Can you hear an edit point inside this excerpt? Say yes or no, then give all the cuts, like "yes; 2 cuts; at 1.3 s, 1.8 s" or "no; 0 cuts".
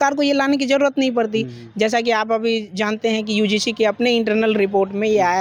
no; 0 cuts